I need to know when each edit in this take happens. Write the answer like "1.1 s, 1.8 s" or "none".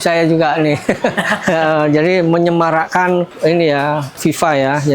3.3 s, 4.2 s